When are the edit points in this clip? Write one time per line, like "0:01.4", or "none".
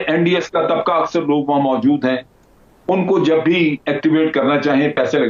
none